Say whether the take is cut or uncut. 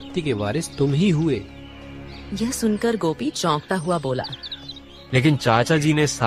uncut